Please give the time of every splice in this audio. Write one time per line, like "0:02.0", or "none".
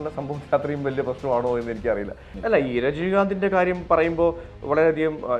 0:02.2

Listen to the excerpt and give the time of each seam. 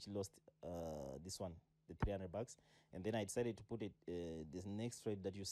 none

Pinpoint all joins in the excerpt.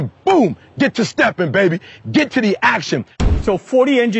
0:03.1

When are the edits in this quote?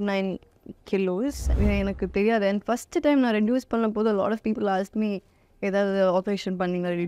0:01.5

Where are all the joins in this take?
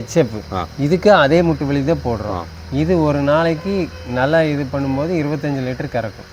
none

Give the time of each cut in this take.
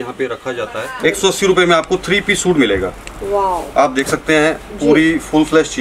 0:01.0

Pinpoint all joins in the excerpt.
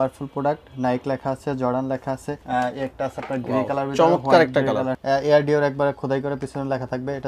0:02.3
0:05.0

